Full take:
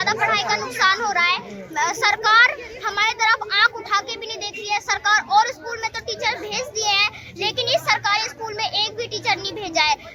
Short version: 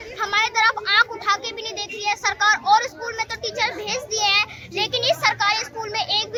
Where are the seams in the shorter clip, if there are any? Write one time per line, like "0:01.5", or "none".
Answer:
none